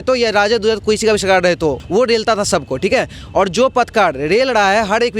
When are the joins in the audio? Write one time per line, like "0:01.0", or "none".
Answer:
0:01.8